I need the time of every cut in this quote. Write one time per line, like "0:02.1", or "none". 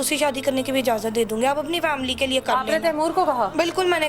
none